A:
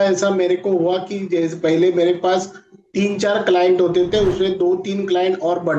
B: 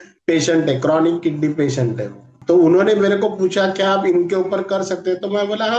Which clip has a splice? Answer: B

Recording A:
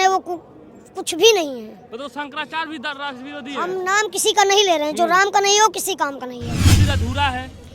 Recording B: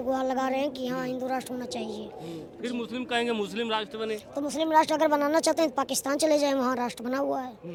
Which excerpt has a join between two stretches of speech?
A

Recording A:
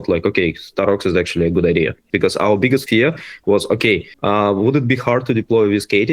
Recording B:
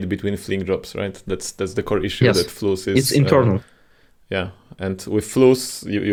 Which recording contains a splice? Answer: A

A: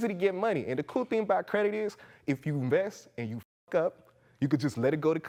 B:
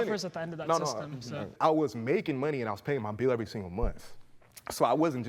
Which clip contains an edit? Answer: B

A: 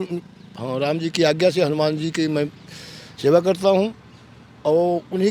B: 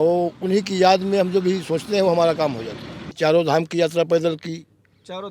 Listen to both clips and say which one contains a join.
B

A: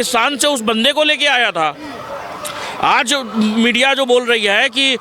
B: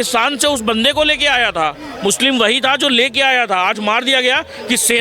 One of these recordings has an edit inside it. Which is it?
B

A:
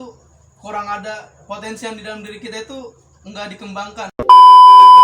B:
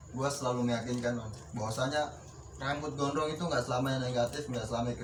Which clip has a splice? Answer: A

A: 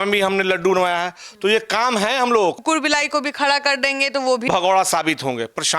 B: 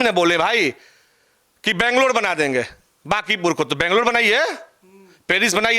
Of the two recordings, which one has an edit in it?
A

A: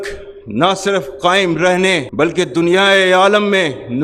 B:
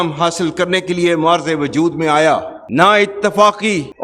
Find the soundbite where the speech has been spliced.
B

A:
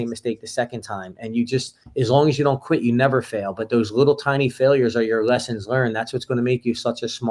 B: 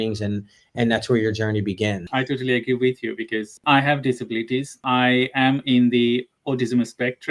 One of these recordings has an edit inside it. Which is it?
B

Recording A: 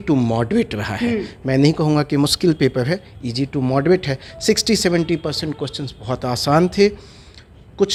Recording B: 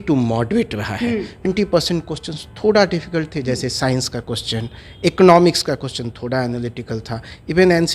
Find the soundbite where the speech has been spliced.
B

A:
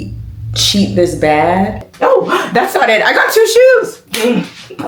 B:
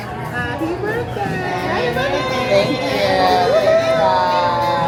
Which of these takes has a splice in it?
A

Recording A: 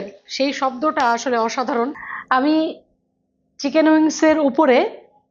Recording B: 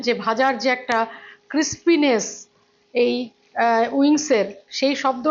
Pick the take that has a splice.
A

